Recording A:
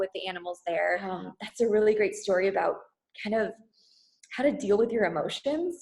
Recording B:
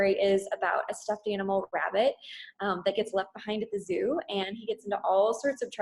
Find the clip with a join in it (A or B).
A